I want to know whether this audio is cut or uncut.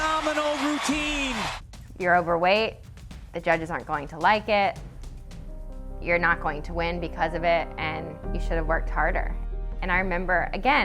cut